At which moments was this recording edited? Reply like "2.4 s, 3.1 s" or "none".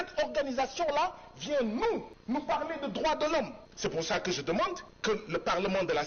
2.1 s, 3.6 s, 4.9 s